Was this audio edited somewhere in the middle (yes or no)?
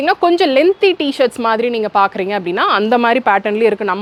no